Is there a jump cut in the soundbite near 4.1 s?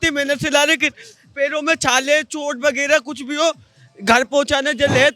no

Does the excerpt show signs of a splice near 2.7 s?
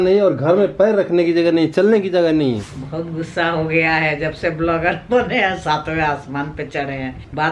yes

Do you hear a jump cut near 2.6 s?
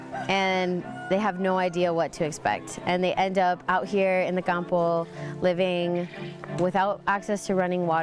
yes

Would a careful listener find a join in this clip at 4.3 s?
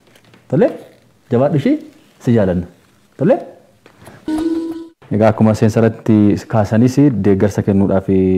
yes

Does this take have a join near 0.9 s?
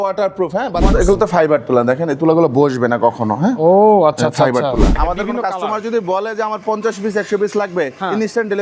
yes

